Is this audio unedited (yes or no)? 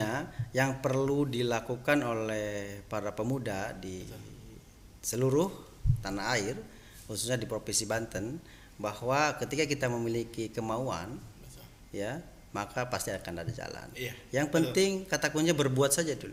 yes